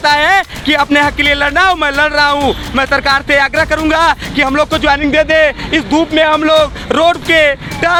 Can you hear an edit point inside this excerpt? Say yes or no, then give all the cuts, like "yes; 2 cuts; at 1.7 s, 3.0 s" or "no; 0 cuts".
no; 0 cuts